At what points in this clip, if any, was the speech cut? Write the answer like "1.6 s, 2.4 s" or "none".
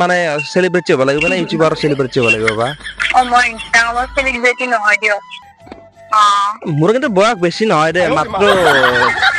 5.4 s